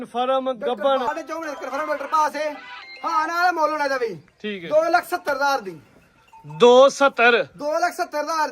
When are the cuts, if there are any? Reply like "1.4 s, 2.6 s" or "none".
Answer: 1.1 s